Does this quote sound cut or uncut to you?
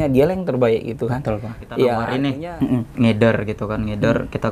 cut